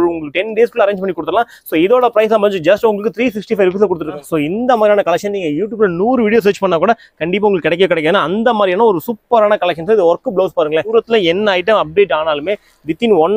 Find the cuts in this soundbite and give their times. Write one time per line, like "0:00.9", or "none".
0:04.2
0:10.9